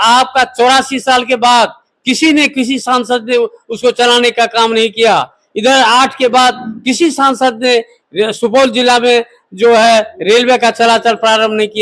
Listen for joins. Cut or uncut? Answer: uncut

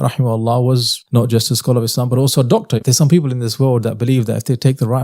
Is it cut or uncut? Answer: cut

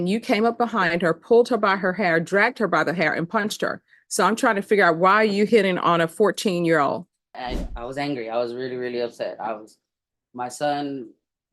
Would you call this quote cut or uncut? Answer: cut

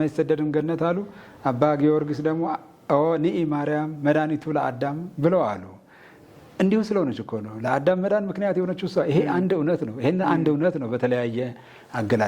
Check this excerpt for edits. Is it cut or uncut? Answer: uncut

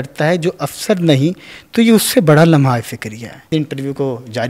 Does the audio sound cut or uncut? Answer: cut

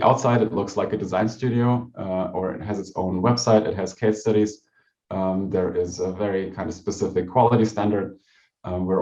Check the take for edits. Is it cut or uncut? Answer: uncut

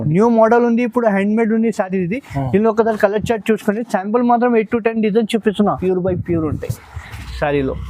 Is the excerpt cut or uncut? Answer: cut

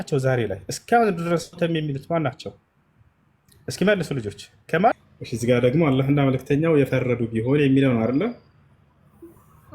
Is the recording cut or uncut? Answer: cut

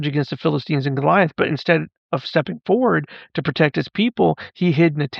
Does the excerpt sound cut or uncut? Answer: uncut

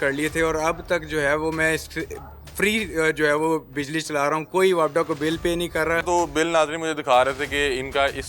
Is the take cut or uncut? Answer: cut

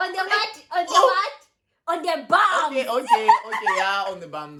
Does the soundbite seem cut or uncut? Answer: uncut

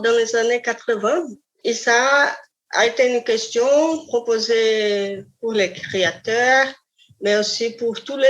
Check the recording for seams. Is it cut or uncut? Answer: cut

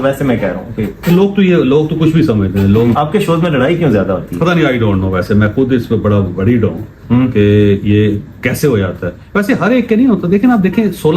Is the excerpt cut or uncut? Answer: cut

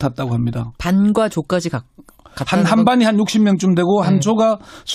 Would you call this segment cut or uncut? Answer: uncut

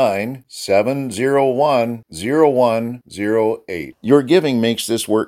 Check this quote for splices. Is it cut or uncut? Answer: uncut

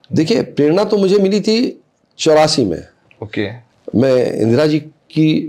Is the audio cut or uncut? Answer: cut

